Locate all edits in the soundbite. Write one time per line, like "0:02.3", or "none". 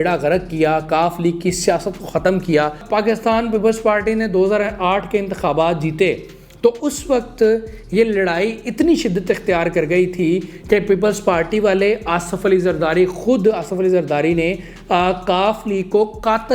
0:02.8

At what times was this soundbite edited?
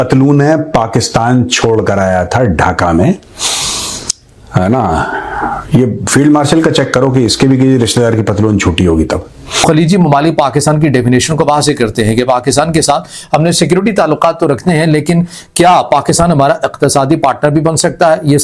0:09.6

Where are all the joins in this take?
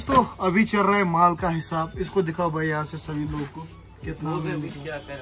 none

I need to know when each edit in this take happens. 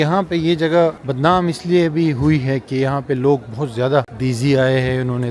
0:01.1
0:04.1

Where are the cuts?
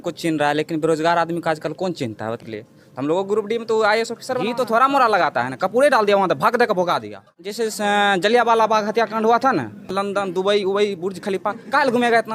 0:02.4
0:04.4
0:07.6
0:09.9

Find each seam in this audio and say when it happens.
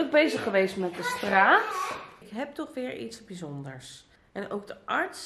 0:02.3

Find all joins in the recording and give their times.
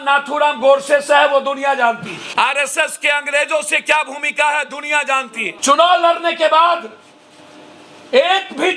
0:02.2
0:05.5

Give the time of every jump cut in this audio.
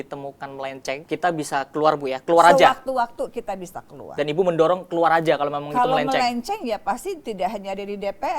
0:01.0

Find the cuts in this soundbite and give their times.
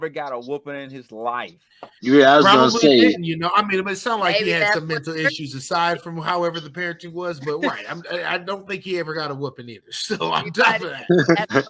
none

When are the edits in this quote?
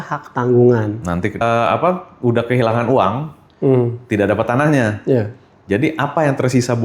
0:01.4

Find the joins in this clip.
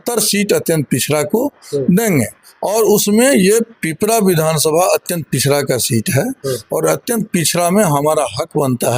none

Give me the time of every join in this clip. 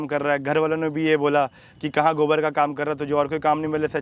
none

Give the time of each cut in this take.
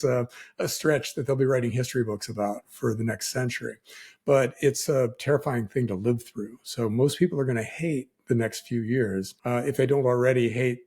0:09.3

